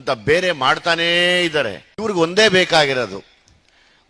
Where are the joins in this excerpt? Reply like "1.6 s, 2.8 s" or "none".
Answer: 1.9 s